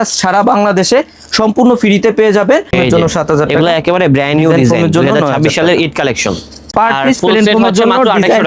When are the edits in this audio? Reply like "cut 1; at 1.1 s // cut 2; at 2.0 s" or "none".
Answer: cut 1; at 2.7 s // cut 2; at 6.6 s